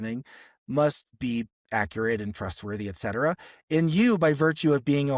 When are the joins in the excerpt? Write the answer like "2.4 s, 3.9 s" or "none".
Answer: none